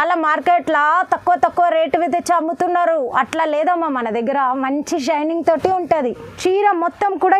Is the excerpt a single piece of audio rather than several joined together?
no; 1 cut; at 6.3 s

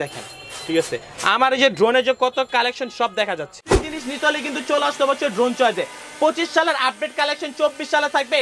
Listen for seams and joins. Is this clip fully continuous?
no; 1 cut; at 3.6 s

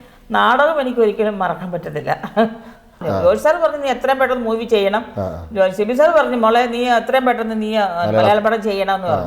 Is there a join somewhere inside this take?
yes; 1 cut; at 3.0 s

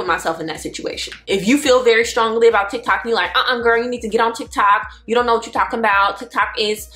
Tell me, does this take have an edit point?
no; 0 cuts

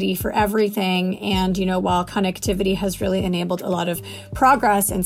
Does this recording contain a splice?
no; 0 cuts

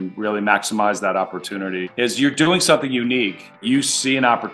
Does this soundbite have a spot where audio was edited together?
yes; 2 cuts; at 1.8 s, 3.6 s

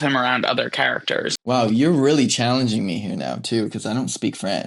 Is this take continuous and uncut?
no; 1 cut; at 1.4 s

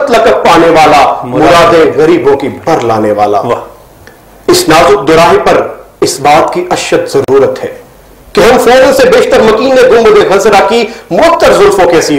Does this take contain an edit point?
no; 0 cuts

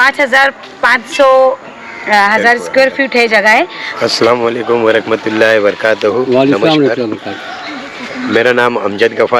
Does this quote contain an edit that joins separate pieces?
yes; 1 cut; at 3.8 s

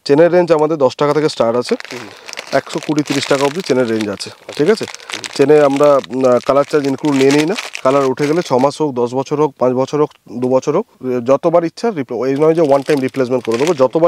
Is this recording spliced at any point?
no; 0 cuts

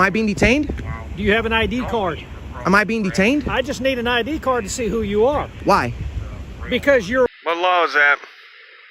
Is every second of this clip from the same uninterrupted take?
no; 1 cut; at 7.3 s

